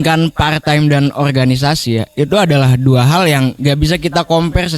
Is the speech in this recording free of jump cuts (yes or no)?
yes